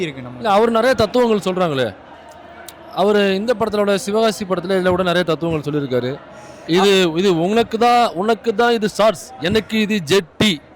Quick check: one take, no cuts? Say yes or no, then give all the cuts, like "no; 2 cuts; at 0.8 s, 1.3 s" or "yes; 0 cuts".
yes; 0 cuts